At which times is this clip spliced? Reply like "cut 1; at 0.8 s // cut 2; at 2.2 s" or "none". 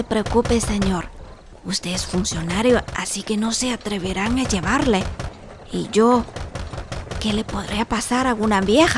none